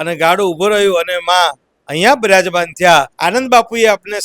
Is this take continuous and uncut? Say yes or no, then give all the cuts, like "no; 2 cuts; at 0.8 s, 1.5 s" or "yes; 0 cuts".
no; 1 cut; at 3.2 s